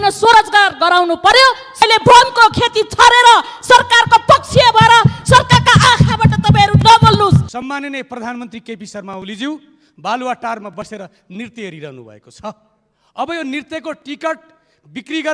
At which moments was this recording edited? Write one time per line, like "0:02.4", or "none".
0:01.8
0:07.5